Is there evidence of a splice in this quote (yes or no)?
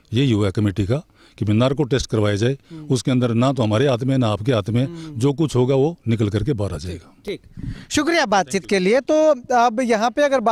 no